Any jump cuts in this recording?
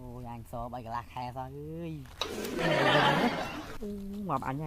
yes; 1 cut; at 3.8 s

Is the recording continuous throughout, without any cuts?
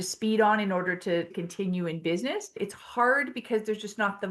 no; 2 cuts; at 1.3 s, 2.6 s

